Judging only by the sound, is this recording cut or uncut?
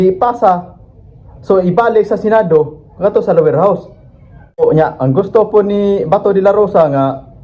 cut